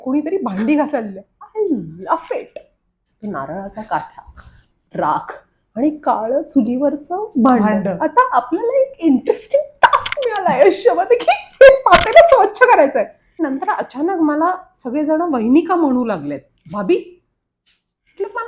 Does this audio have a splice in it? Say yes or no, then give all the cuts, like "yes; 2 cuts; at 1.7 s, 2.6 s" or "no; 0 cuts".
yes; 2 cuts; at 3.0 s, 13.2 s